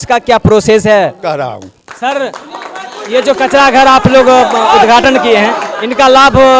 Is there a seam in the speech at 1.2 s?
yes; 1 cut; at 1.2 s

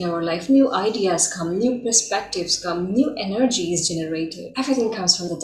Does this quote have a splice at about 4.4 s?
yes; 1 cut; at 4.4 s

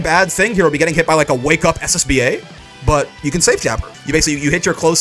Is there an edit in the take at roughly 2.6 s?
no; 1 cut; at 3.9 s

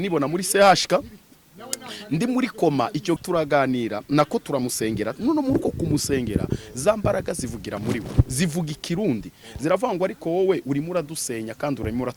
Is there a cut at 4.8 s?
no; 1 cut; at 3.2 s

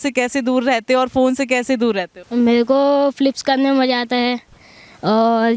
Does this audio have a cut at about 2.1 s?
yes; 1 cut; at 2.1 s

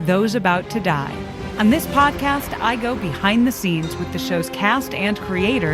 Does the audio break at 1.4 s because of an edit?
yes; 1 cut; at 1.4 s

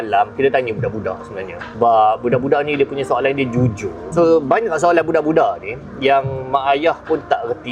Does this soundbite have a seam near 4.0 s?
yes; 2 cuts; at 1.6 s, 4.0 s

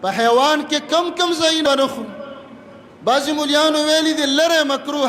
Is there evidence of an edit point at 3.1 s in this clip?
no; 1 cut; at 1.6 s

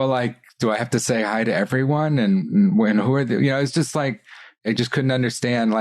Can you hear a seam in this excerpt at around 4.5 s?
yes; 1 cut; at 4.5 s

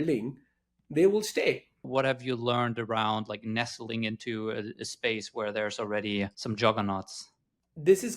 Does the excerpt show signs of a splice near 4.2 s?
no; 2 cuts; at 1.8 s, 6.4 s

